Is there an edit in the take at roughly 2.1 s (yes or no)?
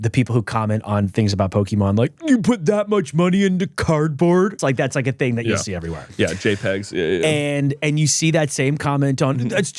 no